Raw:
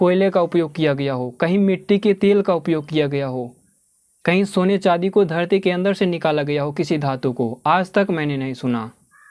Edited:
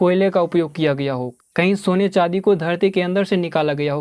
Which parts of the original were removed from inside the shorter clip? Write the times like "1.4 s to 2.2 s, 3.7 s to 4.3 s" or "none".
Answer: 1.3 s to 4.0 s